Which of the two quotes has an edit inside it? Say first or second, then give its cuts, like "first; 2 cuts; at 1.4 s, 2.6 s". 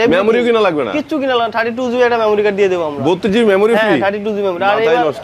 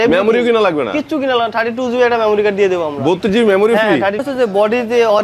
second; 1 cut; at 4.2 s